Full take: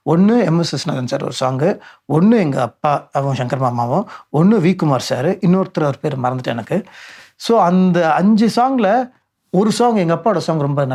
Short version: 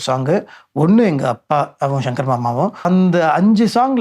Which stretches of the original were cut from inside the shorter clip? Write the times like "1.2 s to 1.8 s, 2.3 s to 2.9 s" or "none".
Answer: 4.2 s to 7.7 s